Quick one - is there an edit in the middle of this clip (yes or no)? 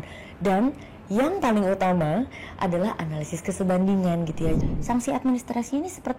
yes